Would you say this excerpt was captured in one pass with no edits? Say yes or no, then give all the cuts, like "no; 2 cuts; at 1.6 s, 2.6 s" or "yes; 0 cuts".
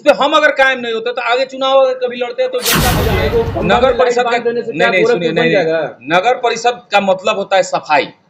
no; 1 cut; at 2.8 s